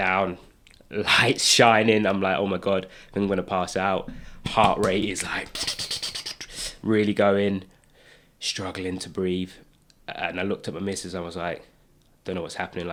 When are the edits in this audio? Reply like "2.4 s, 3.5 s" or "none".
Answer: none